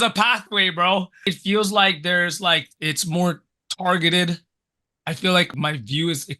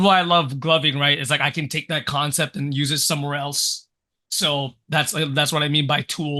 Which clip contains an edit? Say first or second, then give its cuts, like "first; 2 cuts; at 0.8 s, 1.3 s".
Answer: first; 3 cuts; at 1.2 s, 2.7 s, 5.5 s